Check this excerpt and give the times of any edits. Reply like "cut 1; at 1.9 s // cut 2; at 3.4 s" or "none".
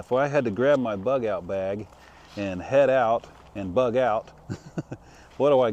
none